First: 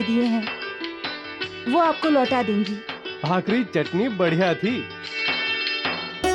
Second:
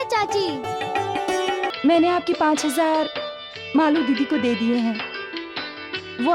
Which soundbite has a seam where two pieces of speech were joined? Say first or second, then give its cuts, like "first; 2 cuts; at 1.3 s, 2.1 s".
second; 1 cut; at 1.7 s